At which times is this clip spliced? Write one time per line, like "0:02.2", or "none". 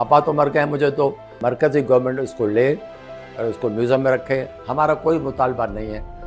0:01.3